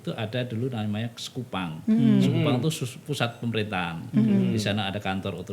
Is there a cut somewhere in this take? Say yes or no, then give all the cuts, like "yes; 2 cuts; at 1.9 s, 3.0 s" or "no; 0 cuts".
no; 0 cuts